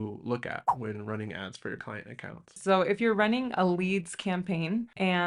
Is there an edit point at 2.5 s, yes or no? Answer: yes